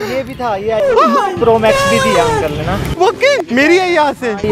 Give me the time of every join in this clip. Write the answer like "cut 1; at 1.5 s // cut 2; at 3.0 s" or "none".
cut 1; at 3.5 s